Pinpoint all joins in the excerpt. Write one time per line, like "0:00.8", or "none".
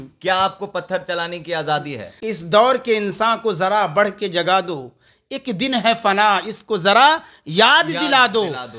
0:02.1